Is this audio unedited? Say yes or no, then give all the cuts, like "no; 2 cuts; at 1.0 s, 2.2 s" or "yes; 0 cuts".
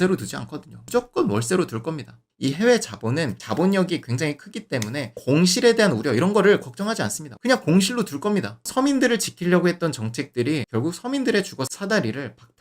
no; 3 cuts; at 2.2 s, 7.4 s, 8.6 s